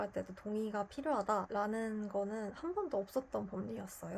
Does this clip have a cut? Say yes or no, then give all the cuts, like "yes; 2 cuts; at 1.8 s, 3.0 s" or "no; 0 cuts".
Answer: no; 0 cuts